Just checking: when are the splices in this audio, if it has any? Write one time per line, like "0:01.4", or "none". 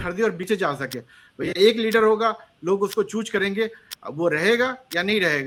none